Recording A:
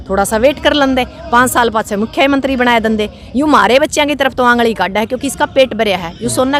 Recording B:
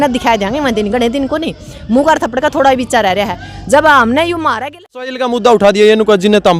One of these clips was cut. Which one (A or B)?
B